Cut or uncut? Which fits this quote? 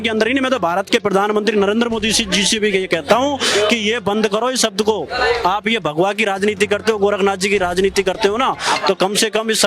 uncut